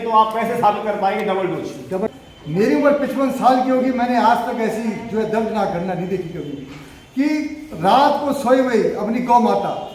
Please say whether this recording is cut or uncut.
cut